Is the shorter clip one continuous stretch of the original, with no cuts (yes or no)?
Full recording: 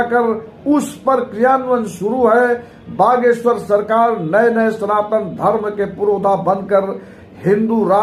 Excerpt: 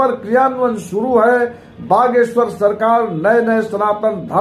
yes